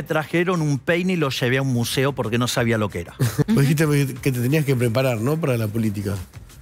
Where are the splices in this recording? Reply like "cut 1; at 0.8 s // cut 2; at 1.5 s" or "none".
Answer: cut 1; at 3.4 s